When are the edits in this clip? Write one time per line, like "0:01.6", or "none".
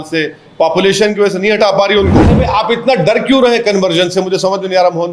0:02.5